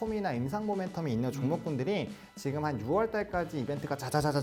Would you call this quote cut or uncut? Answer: uncut